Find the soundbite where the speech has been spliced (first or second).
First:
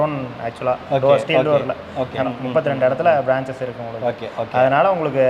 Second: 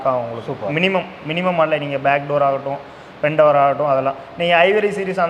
first